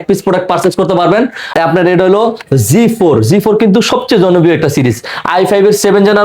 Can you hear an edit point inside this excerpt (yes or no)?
yes